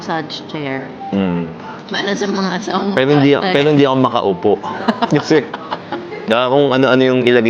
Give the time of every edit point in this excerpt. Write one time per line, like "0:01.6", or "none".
none